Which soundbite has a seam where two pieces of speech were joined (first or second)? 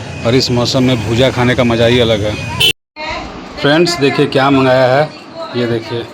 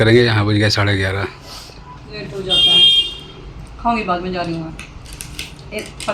first